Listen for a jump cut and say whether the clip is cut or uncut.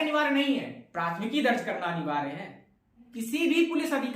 cut